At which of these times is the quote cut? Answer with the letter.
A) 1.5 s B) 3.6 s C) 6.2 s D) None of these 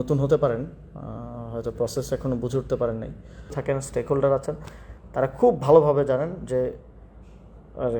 B